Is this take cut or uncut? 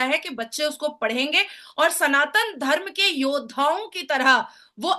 uncut